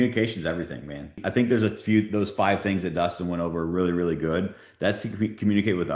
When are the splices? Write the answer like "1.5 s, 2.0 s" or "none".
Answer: 1.2 s